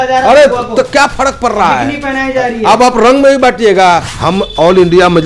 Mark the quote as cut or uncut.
cut